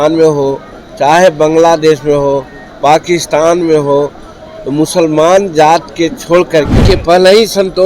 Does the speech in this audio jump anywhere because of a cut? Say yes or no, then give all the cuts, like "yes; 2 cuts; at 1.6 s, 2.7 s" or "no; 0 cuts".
yes; 1 cut; at 6.8 s